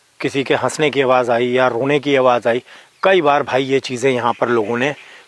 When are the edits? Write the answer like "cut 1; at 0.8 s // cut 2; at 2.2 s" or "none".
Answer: none